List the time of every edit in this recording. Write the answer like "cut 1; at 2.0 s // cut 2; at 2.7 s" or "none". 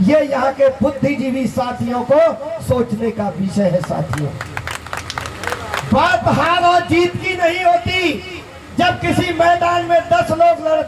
none